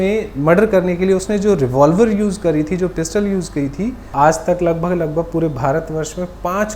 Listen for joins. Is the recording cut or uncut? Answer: cut